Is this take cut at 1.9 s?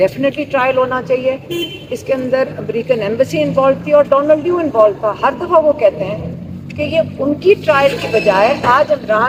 no; 0 cuts

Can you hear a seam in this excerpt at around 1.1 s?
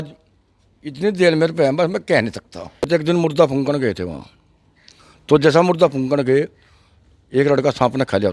no; 1 cut; at 2.9 s

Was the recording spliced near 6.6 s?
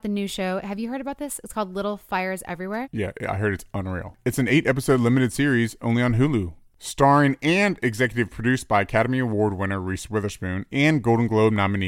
yes; 1 cut; at 6.6 s

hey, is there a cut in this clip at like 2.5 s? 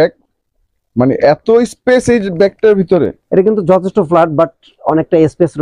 no; 0 cuts

